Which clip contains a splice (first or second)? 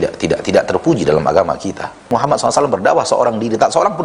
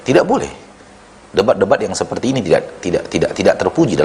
first